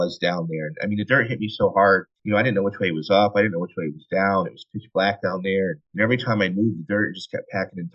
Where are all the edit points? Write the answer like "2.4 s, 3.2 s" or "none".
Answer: 2.1 s, 5.8 s